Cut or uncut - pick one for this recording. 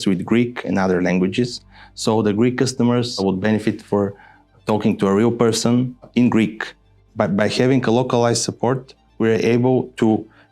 cut